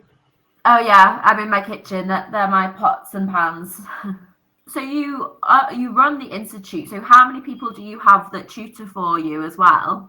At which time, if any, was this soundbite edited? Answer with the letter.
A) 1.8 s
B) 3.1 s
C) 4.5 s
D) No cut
C